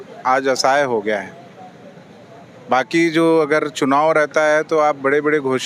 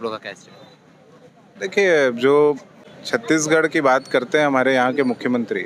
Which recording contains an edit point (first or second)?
second